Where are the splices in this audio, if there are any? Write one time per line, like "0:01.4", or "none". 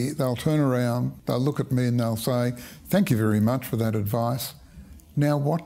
0:01.1